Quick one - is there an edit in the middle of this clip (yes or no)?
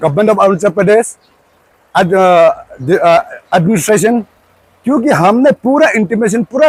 no